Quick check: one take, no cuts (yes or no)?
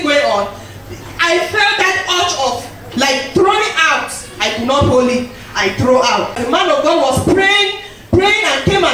no